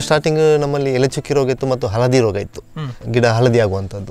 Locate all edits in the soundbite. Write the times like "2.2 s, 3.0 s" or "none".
2.9 s